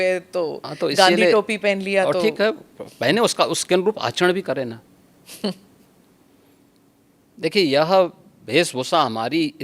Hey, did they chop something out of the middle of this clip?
no; 0 cuts

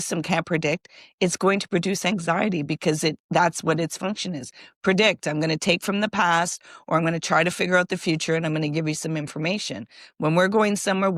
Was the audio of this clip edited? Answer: no; 0 cuts

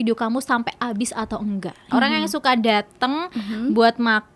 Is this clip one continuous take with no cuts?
no; 1 cut; at 1.8 s

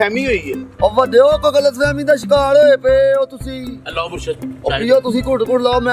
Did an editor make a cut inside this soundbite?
yes; 1 cut; at 3.8 s

